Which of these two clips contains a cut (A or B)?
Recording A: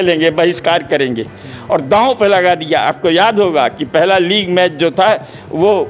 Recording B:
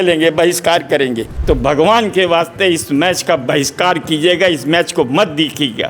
B